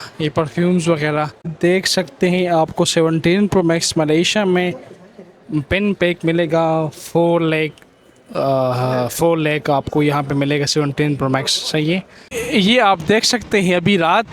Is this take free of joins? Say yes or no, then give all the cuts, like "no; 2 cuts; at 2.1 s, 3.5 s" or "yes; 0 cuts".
no; 2 cuts; at 1.4 s, 12.3 s